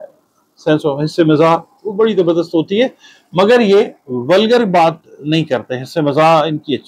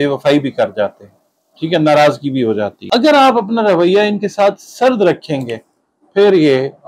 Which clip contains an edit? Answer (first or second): second